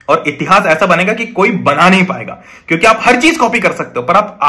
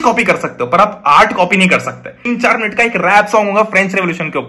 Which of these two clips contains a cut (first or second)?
second